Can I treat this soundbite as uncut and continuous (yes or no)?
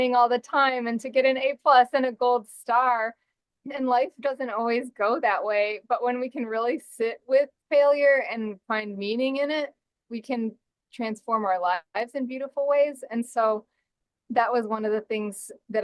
yes